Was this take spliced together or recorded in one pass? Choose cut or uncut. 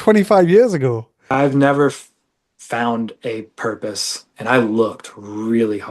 cut